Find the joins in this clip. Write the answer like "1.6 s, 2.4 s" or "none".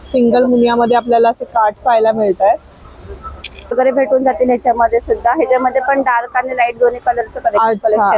3.7 s